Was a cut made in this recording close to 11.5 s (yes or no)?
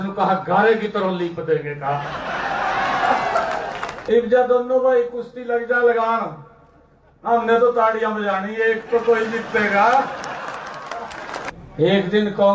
yes